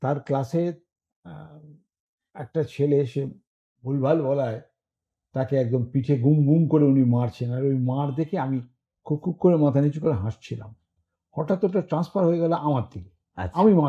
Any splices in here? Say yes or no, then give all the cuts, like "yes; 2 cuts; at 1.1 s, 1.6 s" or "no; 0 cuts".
no; 0 cuts